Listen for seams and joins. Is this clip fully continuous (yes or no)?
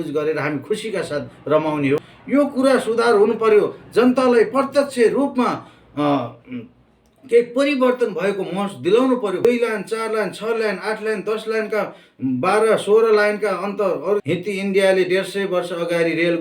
no